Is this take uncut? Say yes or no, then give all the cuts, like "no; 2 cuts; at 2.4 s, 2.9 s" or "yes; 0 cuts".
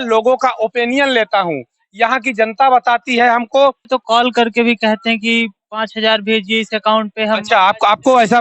no; 1 cut; at 3.8 s